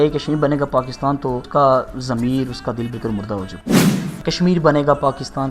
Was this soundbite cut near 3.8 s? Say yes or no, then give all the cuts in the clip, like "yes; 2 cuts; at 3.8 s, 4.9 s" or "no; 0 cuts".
yes; 2 cuts; at 1.5 s, 3.8 s